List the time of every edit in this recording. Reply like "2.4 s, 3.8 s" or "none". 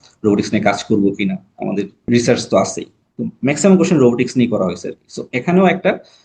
2.1 s